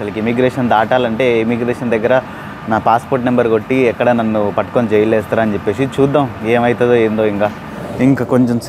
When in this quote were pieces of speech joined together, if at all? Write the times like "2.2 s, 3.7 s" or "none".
7.7 s